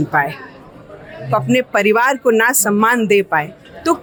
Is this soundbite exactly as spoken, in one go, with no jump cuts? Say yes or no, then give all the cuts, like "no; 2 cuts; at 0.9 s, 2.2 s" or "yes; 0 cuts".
yes; 0 cuts